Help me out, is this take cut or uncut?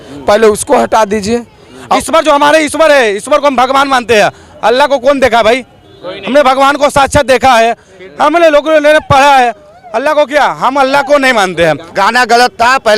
cut